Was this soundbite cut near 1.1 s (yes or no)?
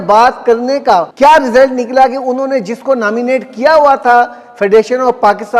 yes